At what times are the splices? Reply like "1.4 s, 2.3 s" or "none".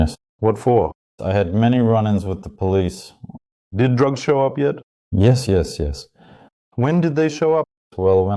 3.6 s